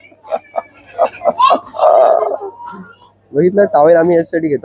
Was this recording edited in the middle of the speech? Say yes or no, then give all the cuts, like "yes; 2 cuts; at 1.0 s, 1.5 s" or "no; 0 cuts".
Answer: no; 0 cuts